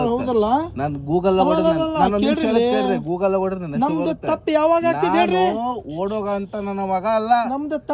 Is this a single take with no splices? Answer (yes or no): yes